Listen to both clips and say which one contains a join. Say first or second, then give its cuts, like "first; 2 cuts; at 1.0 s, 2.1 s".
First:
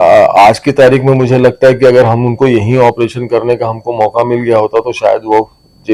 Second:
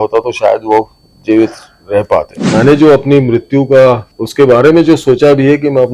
second; 2 cuts; at 2.4 s, 4.1 s